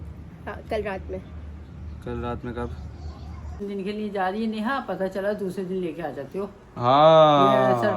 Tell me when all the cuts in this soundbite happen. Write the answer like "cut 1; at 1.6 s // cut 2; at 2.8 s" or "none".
cut 1; at 3.6 s